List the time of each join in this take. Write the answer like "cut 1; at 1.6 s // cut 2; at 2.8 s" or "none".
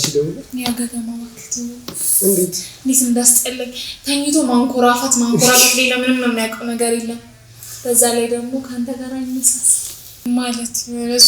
cut 1; at 10.3 s